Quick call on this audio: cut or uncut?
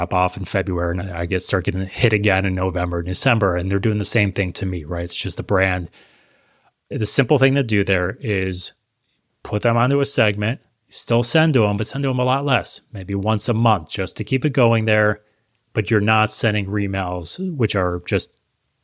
cut